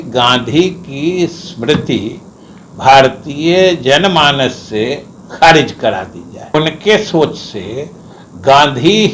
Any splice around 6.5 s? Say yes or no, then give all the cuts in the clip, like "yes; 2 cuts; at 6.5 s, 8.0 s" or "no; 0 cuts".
yes; 1 cut; at 6.5 s